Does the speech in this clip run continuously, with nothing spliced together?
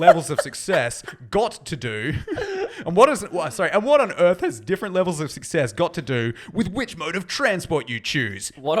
yes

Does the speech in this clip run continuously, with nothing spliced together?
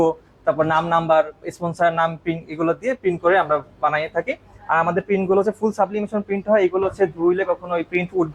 yes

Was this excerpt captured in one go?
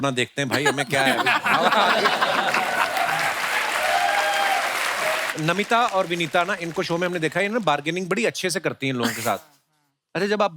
no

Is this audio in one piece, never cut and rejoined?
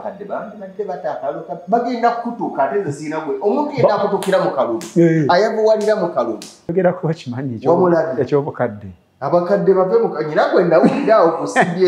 no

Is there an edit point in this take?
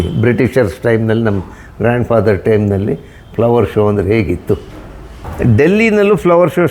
yes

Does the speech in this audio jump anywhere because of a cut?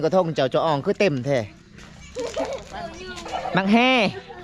no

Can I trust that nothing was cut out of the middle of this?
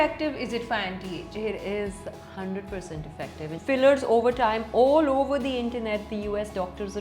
no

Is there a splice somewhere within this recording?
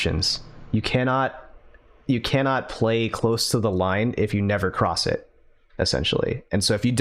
no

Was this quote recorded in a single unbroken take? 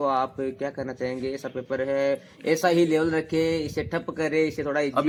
yes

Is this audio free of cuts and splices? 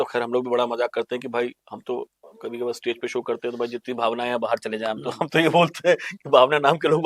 yes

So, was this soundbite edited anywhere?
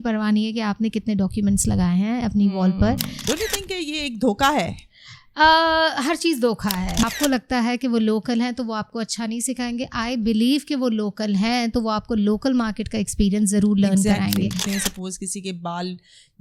yes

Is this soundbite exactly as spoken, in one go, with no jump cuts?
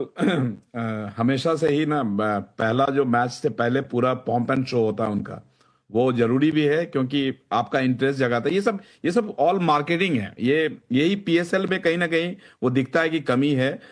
yes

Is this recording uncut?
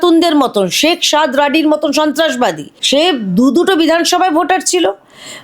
no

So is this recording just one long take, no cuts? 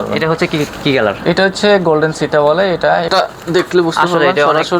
no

